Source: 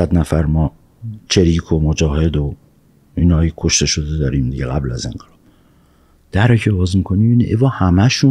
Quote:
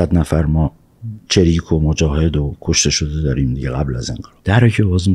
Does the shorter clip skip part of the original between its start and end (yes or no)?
yes